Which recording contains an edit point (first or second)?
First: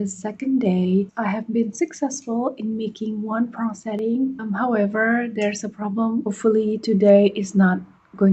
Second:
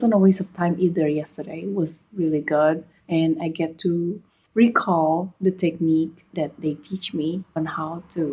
first